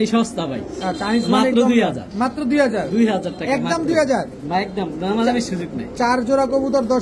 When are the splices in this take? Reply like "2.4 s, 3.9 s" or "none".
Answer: none